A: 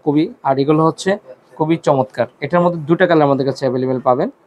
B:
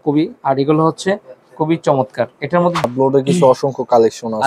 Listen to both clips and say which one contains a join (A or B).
B